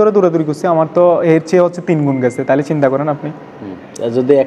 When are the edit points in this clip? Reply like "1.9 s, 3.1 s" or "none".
none